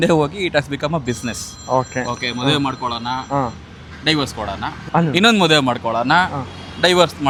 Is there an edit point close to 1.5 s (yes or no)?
no